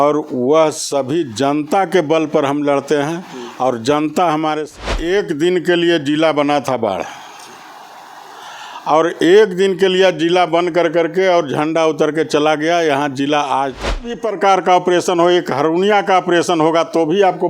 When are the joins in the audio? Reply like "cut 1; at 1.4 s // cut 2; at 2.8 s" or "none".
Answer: cut 1; at 4.7 s // cut 2; at 14.1 s